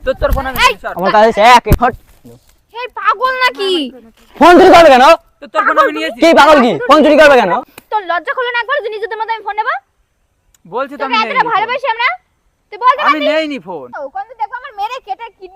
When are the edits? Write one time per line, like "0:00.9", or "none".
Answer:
0:01.7
0:07.6
0:13.9